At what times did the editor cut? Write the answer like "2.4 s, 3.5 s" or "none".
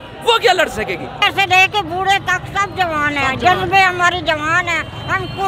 1.2 s